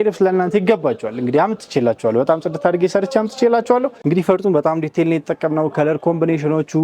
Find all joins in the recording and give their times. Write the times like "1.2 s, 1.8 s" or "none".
3.9 s